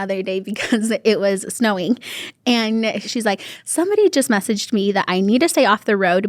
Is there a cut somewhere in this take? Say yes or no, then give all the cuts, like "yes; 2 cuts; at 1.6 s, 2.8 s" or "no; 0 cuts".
yes; 1 cut; at 3.1 s